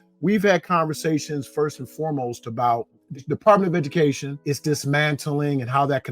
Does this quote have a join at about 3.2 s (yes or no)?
yes